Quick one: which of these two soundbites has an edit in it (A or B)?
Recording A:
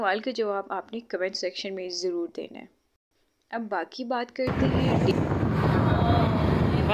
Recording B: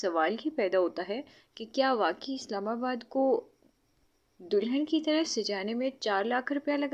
A